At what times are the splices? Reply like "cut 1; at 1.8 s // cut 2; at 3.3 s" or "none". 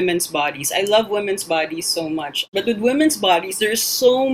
cut 1; at 2.4 s